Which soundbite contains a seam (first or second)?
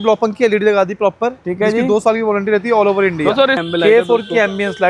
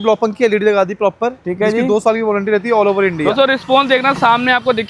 first